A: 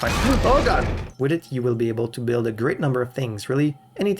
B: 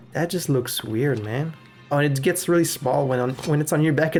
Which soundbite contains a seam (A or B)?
A